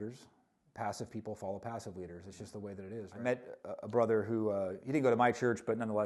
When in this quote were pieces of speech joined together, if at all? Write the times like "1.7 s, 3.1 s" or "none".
3.1 s